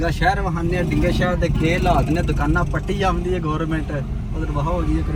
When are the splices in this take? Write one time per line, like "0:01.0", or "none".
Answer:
none